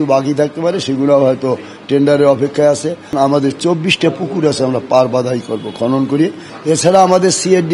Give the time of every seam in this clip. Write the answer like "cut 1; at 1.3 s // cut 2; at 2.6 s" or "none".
cut 1; at 3.1 s // cut 2; at 6.5 s

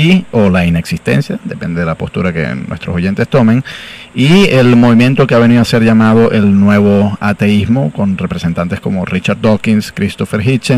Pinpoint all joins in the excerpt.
cut 1; at 3.4 s

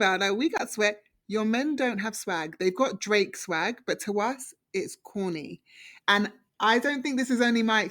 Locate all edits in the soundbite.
cut 1; at 6.0 s

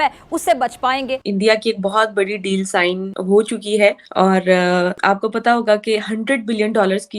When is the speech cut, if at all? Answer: cut 1; at 1.3 s // cut 2; at 3.1 s // cut 3; at 4.0 s // cut 4; at 5.0 s

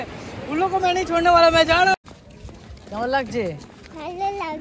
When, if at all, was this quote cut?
cut 1; at 2.1 s

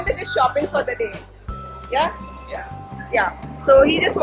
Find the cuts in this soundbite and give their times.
none

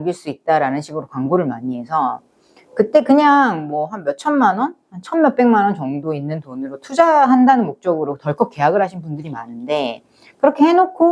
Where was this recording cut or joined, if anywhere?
none

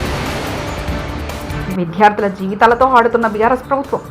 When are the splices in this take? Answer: cut 1; at 1.4 s

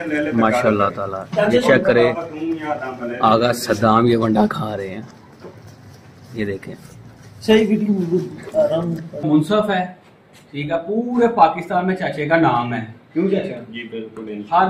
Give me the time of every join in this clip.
cut 1; at 9.2 s

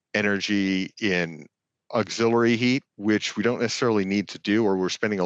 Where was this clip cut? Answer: cut 1; at 2.9 s

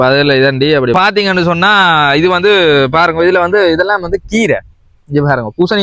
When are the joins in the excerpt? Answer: cut 1; at 0.9 s

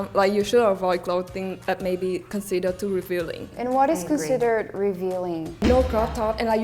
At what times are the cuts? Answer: cut 1; at 3.5 s // cut 2; at 5.6 s

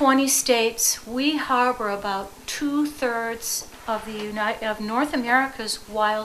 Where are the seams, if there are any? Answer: none

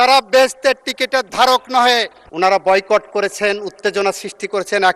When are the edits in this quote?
cut 1; at 2.2 s

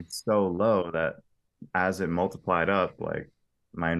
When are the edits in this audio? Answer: none

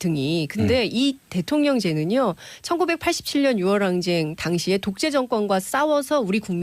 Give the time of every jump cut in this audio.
cut 1; at 4.9 s

